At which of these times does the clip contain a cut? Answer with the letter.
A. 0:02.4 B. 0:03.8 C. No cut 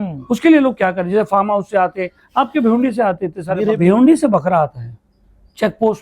B